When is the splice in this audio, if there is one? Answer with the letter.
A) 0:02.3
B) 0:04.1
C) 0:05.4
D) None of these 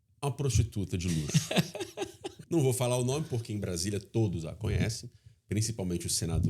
A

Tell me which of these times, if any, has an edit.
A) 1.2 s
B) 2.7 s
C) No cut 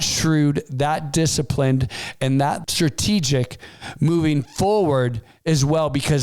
B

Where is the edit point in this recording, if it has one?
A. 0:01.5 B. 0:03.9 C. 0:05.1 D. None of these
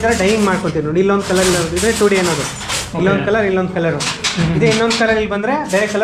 D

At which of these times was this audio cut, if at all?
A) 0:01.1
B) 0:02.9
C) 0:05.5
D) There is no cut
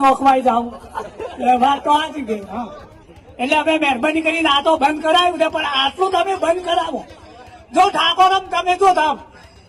D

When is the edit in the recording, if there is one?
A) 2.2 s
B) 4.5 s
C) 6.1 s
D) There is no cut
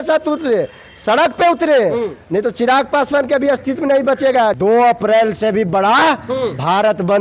B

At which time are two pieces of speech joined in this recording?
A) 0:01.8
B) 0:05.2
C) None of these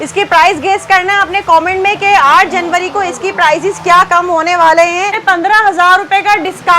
B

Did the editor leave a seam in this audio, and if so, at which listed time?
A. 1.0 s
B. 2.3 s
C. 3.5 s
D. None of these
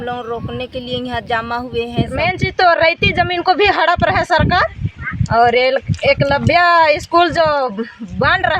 B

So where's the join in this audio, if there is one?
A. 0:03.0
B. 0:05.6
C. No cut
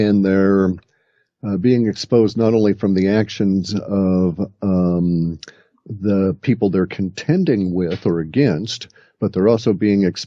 A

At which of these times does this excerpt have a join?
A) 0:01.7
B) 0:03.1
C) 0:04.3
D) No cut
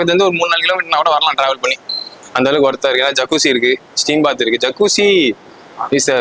D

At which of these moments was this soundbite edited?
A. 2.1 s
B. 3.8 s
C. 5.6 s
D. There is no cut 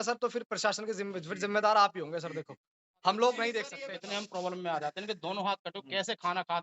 B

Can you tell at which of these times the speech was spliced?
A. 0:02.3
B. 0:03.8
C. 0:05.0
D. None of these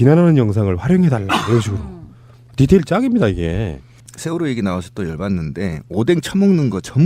D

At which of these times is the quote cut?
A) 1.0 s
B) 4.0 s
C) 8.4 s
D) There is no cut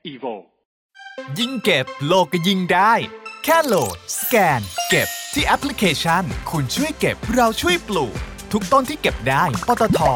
A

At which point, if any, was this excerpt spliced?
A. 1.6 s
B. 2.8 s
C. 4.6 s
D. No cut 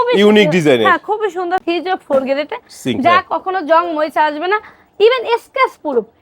A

